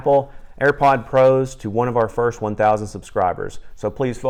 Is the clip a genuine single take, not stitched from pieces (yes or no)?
yes